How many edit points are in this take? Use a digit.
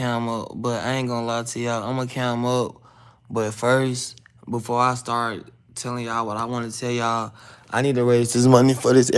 0